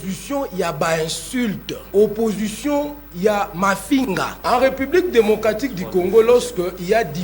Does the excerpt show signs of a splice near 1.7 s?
yes; 2 cuts; at 1.7 s, 4.3 s

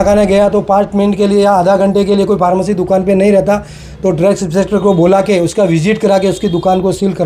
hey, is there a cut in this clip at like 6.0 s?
no; 0 cuts

